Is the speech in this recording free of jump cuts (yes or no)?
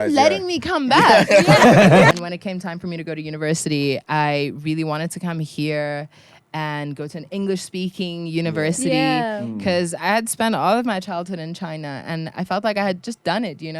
no